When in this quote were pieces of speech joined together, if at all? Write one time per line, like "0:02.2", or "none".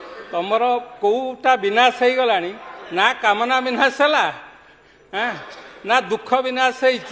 none